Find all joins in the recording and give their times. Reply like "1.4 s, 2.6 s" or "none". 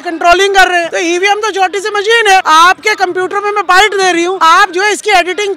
0.9 s, 2.5 s, 4.4 s